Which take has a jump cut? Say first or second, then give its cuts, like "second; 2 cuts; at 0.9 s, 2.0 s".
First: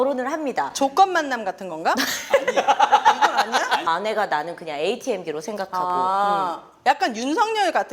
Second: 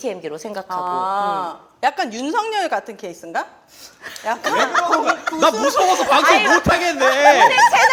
first; 1 cut; at 3.8 s